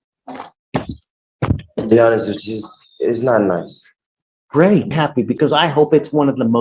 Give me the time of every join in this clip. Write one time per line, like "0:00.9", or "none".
0:05.0